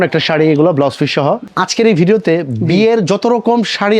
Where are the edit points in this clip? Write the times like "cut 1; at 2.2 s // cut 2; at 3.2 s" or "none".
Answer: cut 1; at 1.4 s